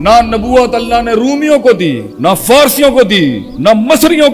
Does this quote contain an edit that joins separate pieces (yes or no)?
yes